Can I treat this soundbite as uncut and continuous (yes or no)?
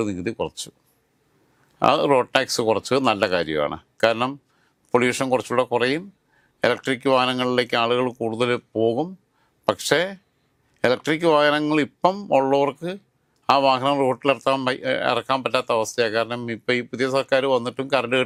yes